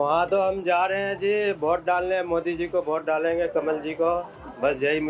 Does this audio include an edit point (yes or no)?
no